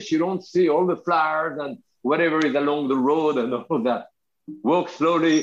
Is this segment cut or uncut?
uncut